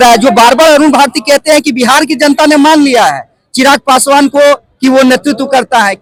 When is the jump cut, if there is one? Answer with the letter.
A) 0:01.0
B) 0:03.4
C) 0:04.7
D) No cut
D